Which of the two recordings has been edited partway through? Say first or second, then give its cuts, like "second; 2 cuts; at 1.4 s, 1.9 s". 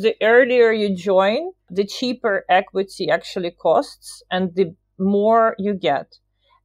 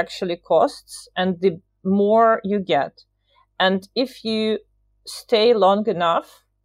first; 1 cut; at 1.7 s